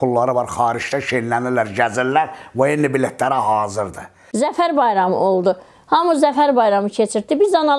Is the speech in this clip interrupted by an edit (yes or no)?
yes